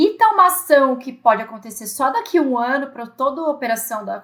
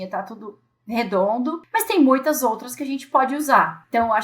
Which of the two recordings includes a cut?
second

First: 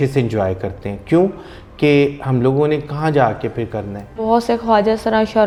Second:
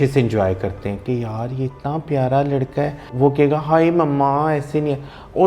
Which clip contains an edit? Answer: second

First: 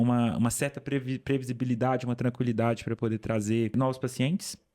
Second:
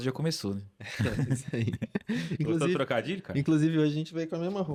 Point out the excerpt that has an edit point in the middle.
first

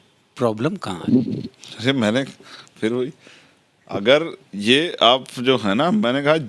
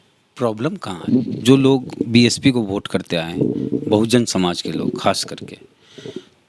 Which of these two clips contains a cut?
second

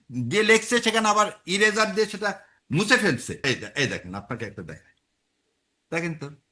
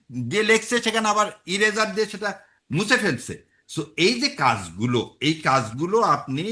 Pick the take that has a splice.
first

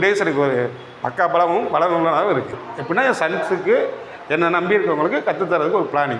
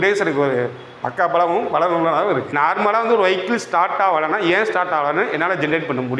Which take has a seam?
second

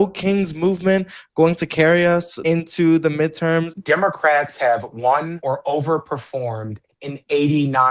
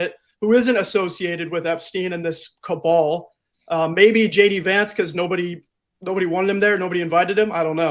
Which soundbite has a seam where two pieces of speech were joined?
first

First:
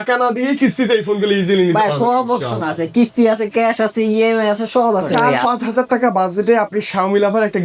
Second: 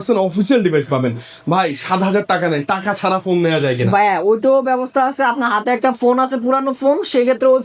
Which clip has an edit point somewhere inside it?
first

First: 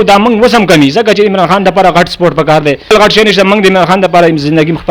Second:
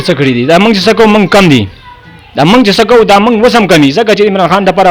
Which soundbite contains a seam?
first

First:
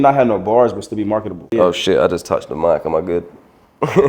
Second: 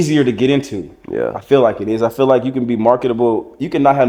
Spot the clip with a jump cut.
first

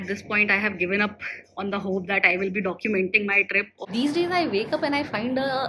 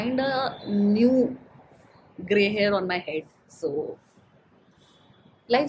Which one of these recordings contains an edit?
first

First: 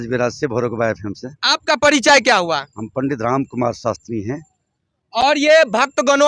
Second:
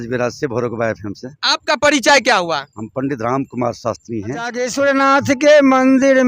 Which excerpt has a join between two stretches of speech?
second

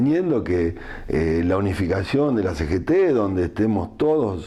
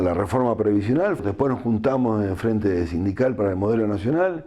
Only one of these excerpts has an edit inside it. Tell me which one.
second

